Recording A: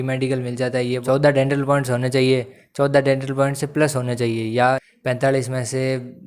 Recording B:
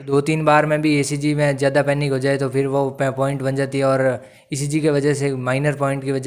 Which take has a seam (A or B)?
A